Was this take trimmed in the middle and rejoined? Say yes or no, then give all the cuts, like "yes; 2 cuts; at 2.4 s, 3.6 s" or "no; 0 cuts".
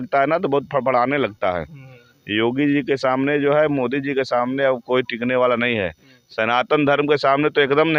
no; 0 cuts